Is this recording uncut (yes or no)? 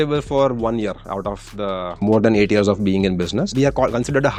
yes